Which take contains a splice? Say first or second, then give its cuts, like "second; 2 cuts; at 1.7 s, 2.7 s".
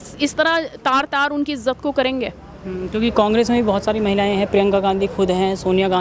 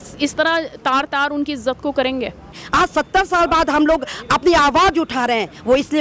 second; 1 cut; at 2.6 s